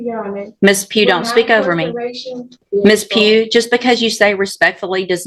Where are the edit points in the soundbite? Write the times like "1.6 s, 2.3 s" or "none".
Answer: 2.5 s